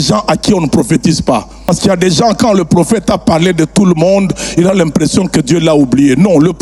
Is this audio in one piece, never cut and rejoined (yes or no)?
no